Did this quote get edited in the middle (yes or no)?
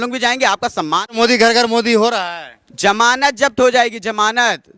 yes